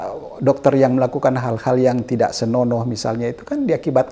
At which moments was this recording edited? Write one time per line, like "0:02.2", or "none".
none